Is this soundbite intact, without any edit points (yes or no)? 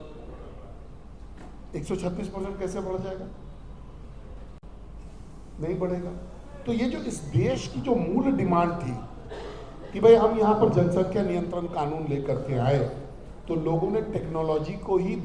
yes